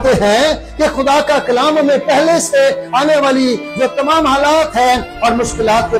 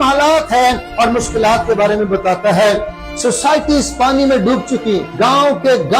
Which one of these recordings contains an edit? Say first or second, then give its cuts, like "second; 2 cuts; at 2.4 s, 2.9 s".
second; 2 cuts; at 3.0 s, 5.1 s